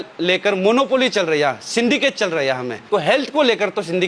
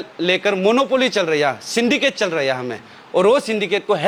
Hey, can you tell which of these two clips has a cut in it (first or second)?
first